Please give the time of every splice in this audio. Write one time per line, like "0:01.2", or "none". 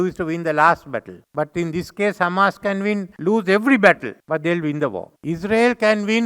0:01.2
0:03.1
0:04.1
0:05.1